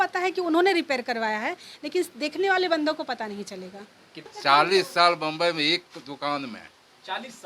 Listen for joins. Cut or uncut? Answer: cut